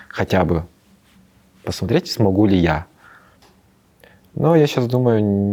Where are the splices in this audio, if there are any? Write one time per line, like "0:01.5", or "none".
none